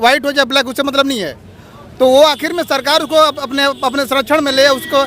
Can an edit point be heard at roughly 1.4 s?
no; 0 cuts

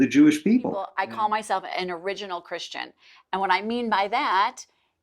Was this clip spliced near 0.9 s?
yes; 1 cut; at 0.9 s

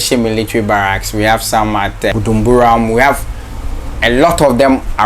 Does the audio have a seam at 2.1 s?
yes; 1 cut; at 2.1 s

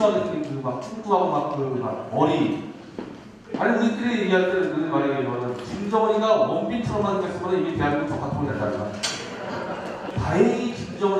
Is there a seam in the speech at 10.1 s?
yes; 1 cut; at 10.1 s

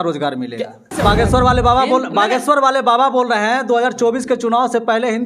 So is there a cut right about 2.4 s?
no; 1 cut; at 0.9 s

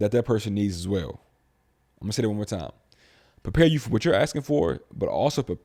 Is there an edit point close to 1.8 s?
no; 0 cuts

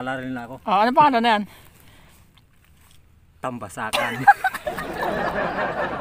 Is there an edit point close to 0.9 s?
no; 1 cut; at 4.8 s

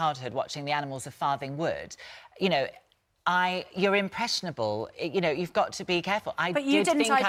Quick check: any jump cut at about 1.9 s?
no; 0 cuts

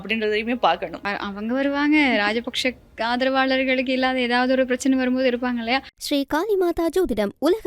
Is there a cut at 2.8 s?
no; 2 cuts; at 1.0 s, 5.9 s

